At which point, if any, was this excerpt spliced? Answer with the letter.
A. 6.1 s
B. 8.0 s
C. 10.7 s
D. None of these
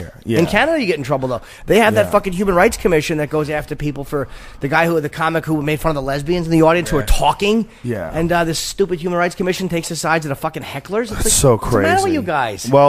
A